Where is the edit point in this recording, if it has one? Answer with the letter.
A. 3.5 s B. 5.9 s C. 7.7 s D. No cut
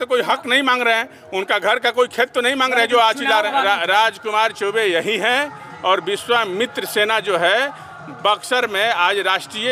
A